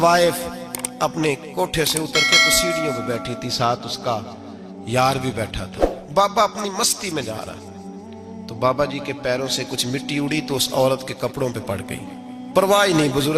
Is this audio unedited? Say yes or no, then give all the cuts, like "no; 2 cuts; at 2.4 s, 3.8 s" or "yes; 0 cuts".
yes; 0 cuts